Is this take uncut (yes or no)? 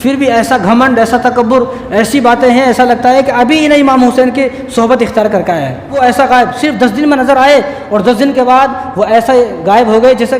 no